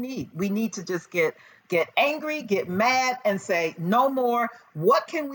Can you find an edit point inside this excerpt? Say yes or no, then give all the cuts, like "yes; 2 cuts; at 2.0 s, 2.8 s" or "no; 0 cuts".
no; 0 cuts